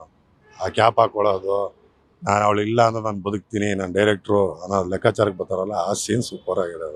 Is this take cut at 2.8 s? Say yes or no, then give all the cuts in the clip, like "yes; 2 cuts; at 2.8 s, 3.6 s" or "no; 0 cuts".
no; 0 cuts